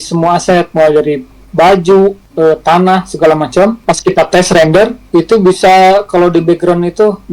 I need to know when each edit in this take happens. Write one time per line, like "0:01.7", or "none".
0:02.2
0:03.8
0:05.0